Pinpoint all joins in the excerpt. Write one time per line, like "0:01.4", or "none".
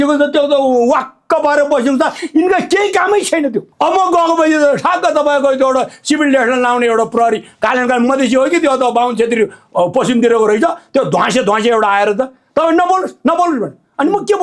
0:03.7